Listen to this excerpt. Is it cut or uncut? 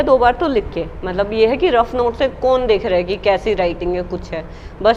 uncut